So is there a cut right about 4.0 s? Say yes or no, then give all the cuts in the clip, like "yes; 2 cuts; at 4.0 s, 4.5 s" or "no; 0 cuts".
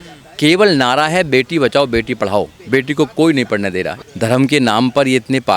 yes; 1 cut; at 4.0 s